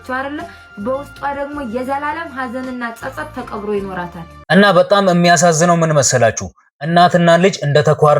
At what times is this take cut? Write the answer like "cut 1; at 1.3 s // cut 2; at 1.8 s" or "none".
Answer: cut 1; at 4.4 s